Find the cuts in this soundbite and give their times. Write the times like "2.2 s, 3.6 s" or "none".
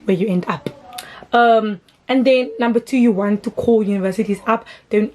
none